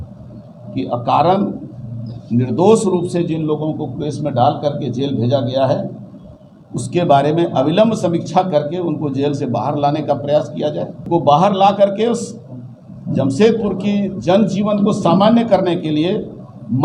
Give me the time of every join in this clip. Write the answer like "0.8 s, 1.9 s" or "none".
11.1 s